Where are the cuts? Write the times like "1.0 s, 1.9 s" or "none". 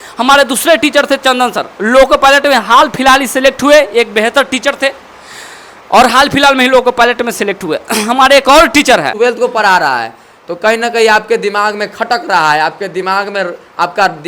9.1 s